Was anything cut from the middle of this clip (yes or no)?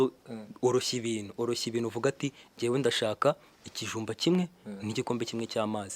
no